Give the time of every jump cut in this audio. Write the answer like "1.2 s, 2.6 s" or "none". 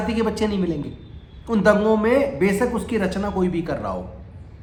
none